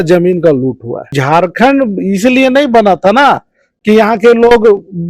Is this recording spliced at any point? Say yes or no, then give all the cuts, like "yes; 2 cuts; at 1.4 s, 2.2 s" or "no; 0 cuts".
yes; 1 cut; at 1.1 s